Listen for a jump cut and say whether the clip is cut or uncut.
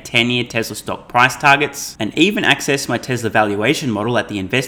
uncut